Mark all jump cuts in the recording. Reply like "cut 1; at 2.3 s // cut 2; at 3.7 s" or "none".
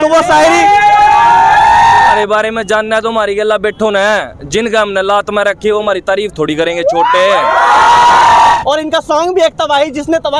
cut 1; at 2.2 s // cut 2; at 8.6 s